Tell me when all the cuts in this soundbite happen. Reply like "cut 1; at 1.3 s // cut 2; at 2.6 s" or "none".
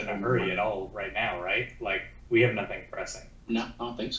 cut 1; at 2.1 s // cut 2; at 3.3 s